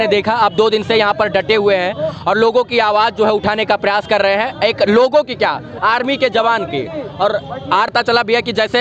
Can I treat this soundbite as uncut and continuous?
no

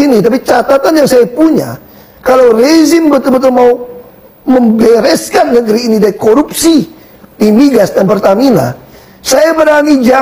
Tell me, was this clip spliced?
no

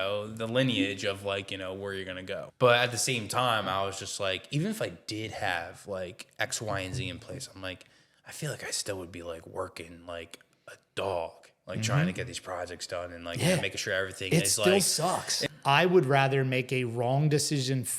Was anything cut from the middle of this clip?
yes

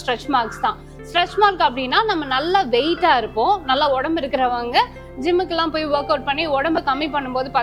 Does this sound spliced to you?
no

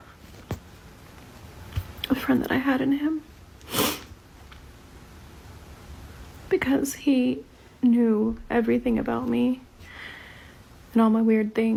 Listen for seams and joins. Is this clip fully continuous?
yes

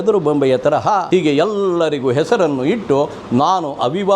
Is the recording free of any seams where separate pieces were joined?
no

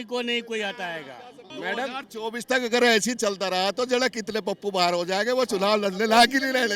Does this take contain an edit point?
yes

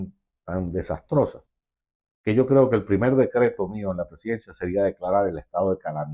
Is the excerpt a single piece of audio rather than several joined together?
yes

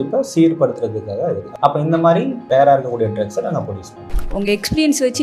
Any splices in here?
yes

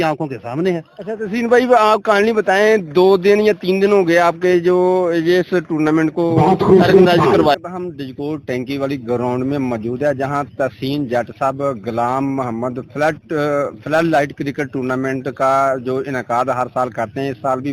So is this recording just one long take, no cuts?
no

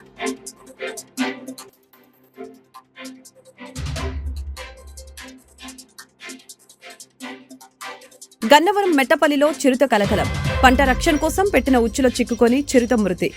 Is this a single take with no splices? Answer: no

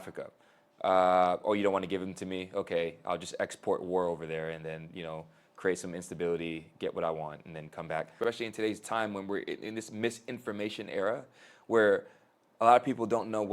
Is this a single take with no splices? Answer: no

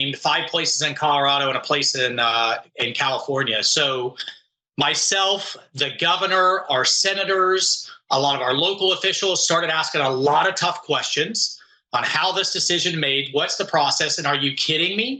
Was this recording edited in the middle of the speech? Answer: no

